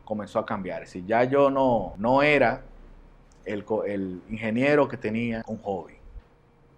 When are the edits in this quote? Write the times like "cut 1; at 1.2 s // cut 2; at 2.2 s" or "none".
cut 1; at 1.9 s // cut 2; at 5.4 s